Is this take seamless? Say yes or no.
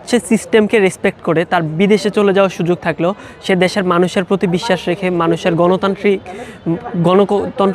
yes